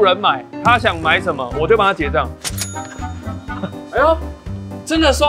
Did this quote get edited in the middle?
no; 0 cuts

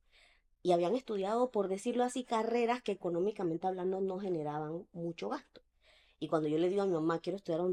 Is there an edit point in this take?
no; 0 cuts

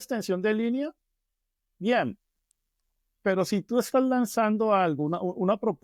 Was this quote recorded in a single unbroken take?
yes; 0 cuts

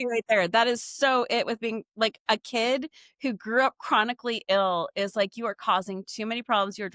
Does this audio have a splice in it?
no; 0 cuts

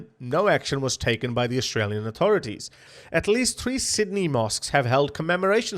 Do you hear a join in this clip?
yes; 1 cut; at 2.8 s

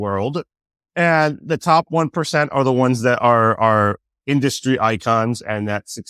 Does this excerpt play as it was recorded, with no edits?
yes; 0 cuts

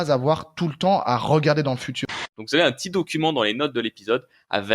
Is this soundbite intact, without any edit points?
no; 1 cut; at 2.1 s

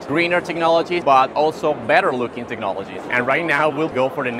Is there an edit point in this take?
yes; 2 cuts; at 1.0 s, 3.0 s

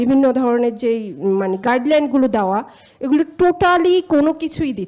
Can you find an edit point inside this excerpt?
no; 0 cuts

